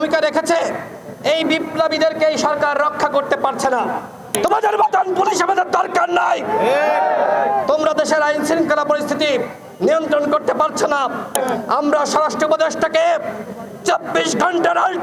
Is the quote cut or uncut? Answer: cut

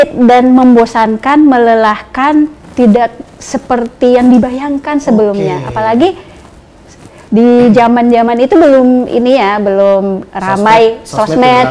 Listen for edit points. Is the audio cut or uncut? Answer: uncut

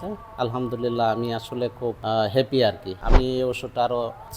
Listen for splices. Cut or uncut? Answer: cut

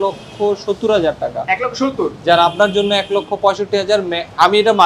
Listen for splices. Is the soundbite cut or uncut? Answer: uncut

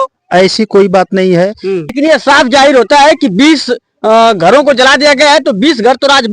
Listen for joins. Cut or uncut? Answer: cut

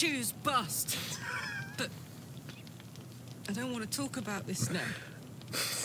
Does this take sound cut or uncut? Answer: uncut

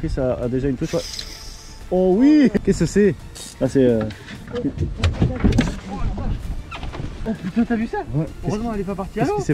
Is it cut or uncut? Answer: cut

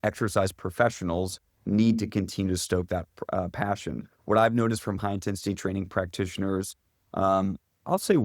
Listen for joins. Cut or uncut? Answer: uncut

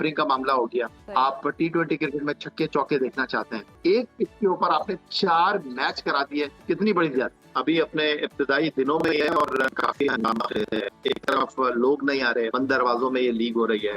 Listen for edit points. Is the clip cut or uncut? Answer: cut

